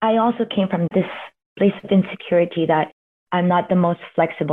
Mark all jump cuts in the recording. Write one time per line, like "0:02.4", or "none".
0:00.9